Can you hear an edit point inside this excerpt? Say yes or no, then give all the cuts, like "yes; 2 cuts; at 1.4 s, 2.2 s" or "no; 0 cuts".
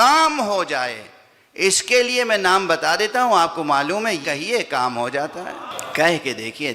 yes; 2 cuts; at 4.2 s, 5.7 s